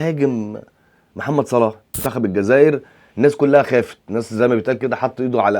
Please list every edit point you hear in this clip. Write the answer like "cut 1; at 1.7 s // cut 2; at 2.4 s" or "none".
cut 1; at 2.1 s